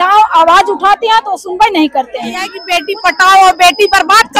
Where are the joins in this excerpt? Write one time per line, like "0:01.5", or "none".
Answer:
0:02.6